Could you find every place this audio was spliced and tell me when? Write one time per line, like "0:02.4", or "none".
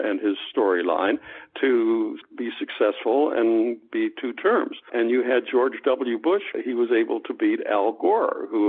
0:02.2
0:04.9
0:06.5